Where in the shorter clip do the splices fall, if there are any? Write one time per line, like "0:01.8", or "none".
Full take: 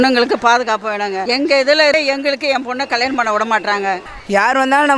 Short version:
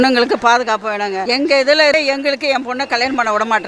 none